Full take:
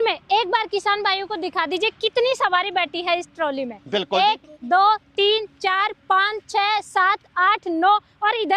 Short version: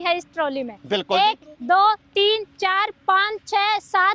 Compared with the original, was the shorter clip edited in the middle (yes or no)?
no